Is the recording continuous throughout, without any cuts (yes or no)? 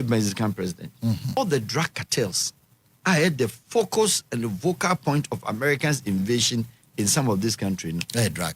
no